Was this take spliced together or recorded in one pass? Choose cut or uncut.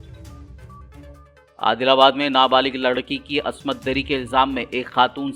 cut